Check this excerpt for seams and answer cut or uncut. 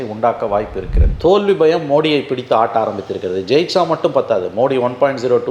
cut